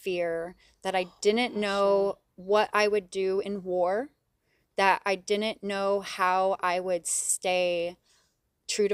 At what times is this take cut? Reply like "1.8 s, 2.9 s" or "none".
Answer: none